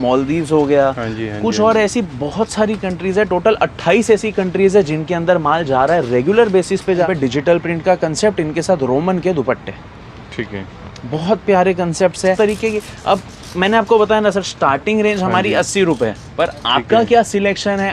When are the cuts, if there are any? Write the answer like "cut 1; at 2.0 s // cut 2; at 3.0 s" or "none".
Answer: cut 1; at 7.0 s // cut 2; at 12.4 s